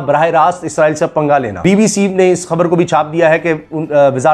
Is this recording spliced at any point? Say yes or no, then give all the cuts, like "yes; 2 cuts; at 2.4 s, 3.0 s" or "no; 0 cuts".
yes; 1 cut; at 1.5 s